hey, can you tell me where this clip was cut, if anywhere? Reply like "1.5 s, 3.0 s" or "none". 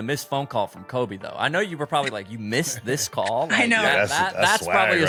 none